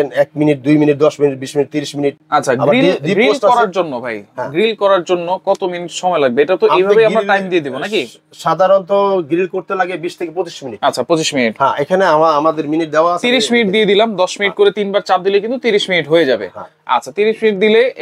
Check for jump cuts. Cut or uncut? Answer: uncut